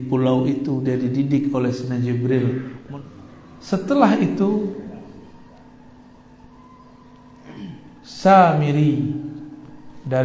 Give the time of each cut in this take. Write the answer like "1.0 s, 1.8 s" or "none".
2.8 s

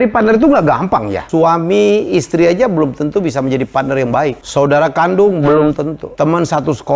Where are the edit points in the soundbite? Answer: 1.2 s, 4.4 s, 6.0 s

